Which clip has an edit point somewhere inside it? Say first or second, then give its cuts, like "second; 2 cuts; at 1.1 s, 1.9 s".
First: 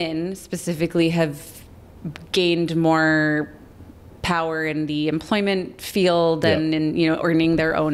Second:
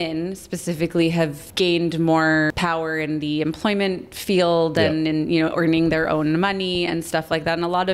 second; 2 cuts; at 1.4 s, 2.5 s